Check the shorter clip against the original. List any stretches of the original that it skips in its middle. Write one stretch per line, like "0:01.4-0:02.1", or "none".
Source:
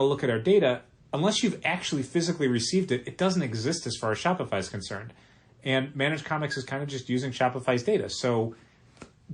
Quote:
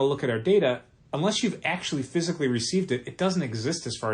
none